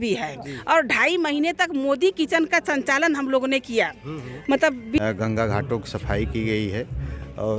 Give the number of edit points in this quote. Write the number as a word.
one